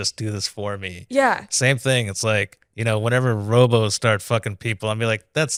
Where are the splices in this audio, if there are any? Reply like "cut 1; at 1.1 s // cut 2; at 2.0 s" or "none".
none